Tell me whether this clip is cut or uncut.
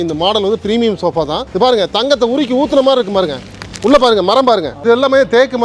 cut